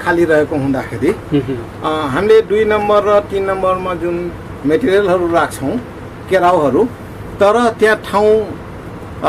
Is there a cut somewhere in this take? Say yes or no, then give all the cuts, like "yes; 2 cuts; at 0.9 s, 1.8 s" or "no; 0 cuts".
no; 0 cuts